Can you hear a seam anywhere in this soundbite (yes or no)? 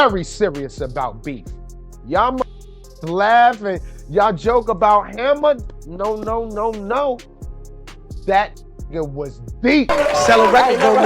yes